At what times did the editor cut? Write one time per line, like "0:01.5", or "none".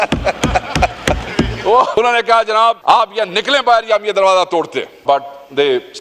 0:01.9
0:02.8
0:05.0